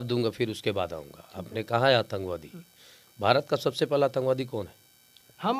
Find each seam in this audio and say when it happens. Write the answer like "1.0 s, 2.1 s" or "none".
none